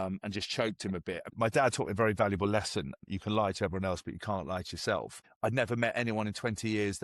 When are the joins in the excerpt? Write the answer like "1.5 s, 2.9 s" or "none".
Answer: 1.3 s, 3.0 s, 5.2 s